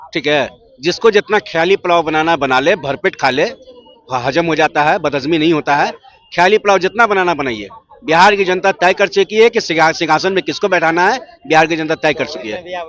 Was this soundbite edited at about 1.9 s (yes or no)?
no